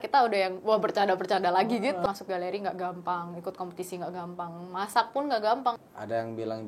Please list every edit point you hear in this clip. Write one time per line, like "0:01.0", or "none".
0:02.1
0:05.8